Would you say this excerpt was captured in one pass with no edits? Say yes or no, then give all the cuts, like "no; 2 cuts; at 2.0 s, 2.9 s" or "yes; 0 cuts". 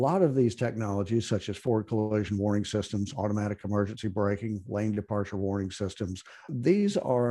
yes; 0 cuts